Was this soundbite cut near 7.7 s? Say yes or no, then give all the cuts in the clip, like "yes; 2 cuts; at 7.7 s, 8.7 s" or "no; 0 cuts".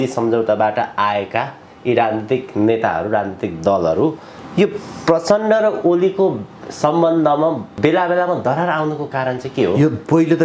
yes; 1 cut; at 7.7 s